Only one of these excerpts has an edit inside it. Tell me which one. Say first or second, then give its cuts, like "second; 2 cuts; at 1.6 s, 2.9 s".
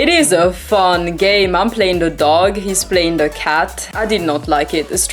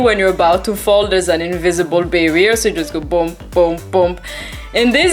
first; 1 cut; at 3.9 s